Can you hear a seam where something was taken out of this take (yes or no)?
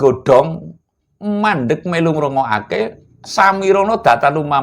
no